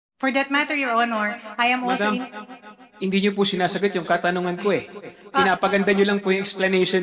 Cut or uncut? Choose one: uncut